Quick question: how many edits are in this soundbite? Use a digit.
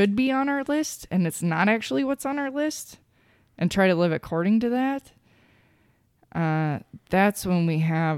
0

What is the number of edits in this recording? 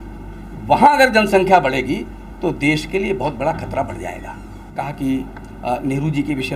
1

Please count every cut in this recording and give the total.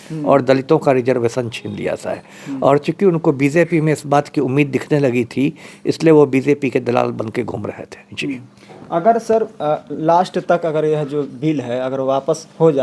0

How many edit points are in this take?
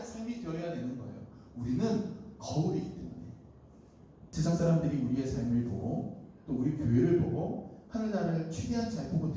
0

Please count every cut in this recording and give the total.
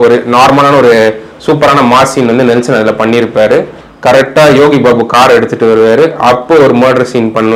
1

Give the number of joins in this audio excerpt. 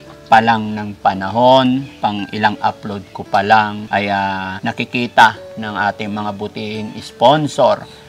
3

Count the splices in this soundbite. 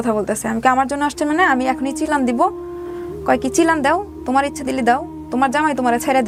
0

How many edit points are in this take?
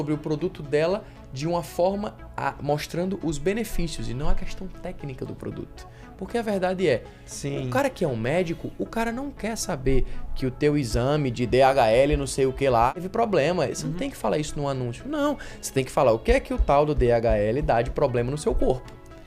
1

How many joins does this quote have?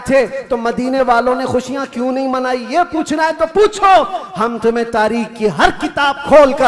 0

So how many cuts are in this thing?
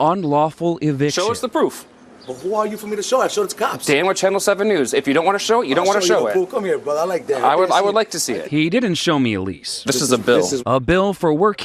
1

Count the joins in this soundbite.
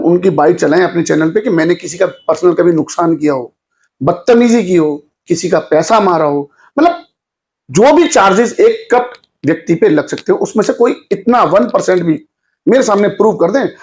0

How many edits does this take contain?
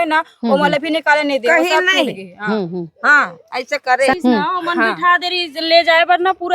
1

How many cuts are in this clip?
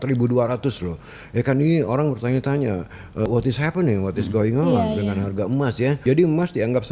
2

